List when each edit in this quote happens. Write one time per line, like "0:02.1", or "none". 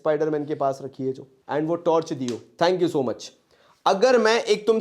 0:01.3
0:02.5